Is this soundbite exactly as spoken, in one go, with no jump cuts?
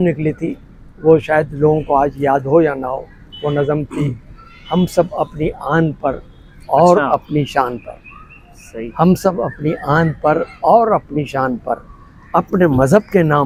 yes; 0 cuts

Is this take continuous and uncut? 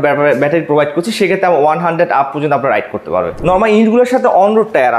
no; 1 cut; at 3.3 s

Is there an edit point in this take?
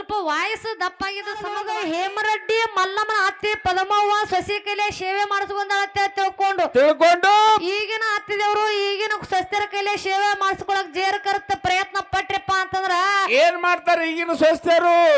yes; 1 cut; at 1.4 s

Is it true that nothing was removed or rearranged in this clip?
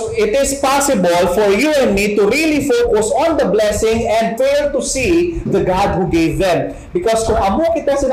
no; 1 cut; at 4.3 s

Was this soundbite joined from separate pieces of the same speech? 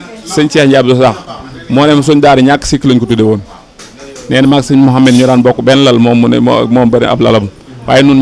no; 0 cuts

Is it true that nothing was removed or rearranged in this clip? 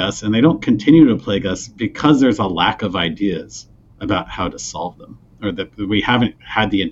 yes; 0 cuts

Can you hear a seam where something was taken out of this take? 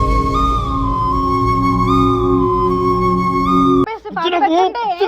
yes; 1 cut; at 4.0 s

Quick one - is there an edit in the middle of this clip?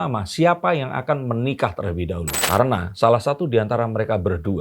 yes; 1 cut; at 2.3 s

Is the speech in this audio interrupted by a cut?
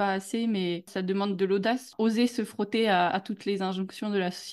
yes; 2 cuts; at 0.9 s, 1.9 s

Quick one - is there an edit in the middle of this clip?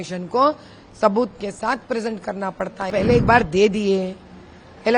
yes; 1 cut; at 2.9 s

